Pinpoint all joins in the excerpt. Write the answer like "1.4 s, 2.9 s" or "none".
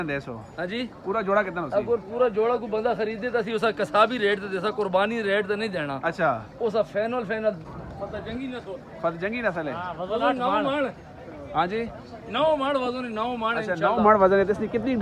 7.6 s